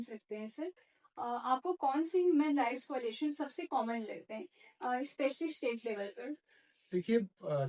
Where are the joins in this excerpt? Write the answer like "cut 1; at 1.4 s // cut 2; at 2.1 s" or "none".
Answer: none